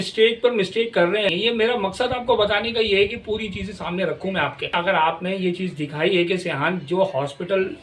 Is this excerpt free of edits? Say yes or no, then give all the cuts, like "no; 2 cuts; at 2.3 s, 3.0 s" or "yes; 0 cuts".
no; 2 cuts; at 1.3 s, 4.7 s